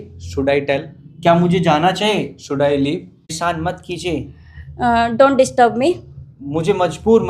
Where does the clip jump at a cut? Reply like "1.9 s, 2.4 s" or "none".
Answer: 3.3 s